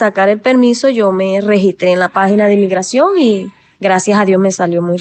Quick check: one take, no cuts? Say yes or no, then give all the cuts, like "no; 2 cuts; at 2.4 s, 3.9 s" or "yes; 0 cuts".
yes; 0 cuts